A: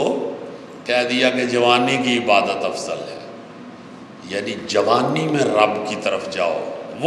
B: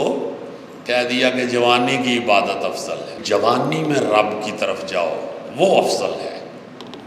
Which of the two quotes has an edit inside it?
B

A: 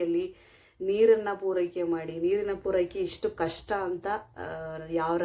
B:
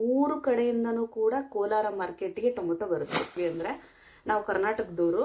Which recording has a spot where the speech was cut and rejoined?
B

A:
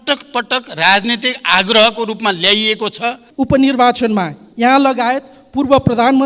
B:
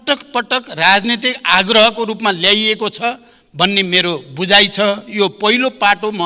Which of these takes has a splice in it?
A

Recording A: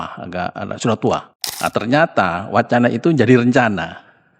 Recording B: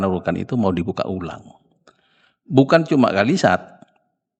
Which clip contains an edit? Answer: A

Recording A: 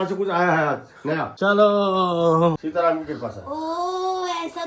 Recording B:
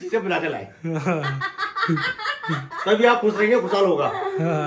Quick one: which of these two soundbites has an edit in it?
A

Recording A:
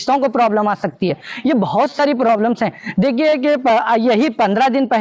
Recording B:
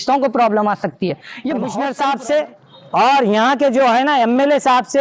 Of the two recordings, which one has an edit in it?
B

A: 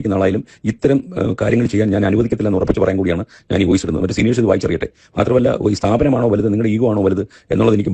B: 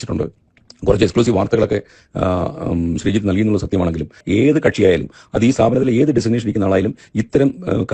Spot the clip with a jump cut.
B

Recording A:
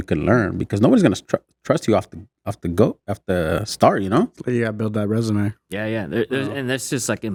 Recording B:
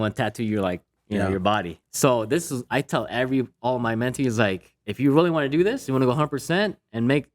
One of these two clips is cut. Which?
B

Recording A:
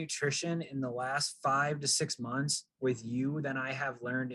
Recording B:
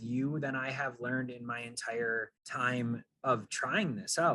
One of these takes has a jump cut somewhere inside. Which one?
B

